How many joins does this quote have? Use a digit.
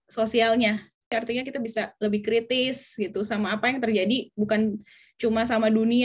1